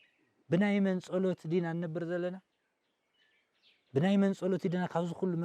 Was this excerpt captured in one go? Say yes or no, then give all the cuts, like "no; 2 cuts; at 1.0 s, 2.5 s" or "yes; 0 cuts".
yes; 0 cuts